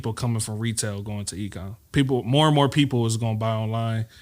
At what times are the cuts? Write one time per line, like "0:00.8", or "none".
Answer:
0:01.8